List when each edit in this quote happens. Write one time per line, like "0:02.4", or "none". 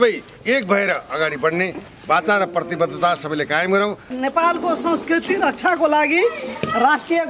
0:04.1

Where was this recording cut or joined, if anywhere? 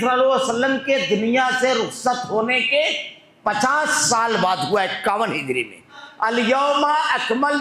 0:06.0

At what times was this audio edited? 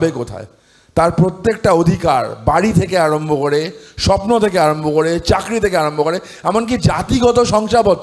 none

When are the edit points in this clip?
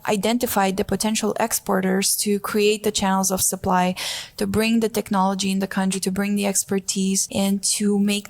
0:06.0
0:07.2

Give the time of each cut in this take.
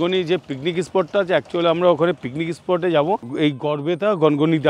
0:03.3

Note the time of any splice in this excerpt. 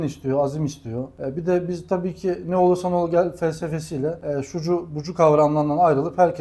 0:01.1
0:04.2

